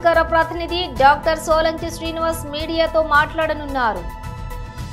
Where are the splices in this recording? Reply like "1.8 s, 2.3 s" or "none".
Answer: 4.0 s